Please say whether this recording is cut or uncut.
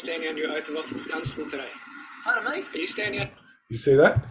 uncut